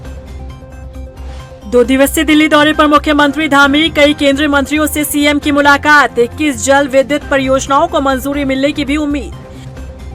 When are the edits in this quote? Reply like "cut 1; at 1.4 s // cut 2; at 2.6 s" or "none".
cut 1; at 1.5 s